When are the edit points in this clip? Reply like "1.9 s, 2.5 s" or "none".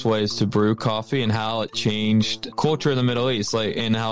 2.4 s